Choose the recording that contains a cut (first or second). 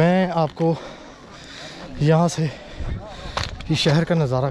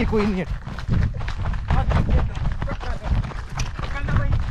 second